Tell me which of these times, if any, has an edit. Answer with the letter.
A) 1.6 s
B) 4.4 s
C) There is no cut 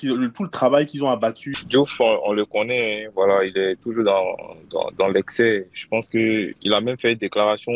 A